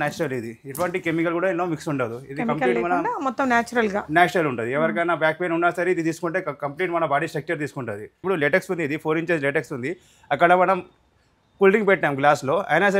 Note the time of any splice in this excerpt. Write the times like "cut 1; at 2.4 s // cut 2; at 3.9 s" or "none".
cut 1; at 8.2 s